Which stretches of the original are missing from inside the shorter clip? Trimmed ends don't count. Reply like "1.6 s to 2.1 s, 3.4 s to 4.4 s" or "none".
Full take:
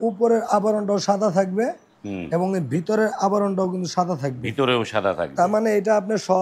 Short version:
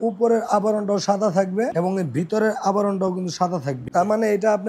1.7 s to 2.3 s, 4.4 s to 5.3 s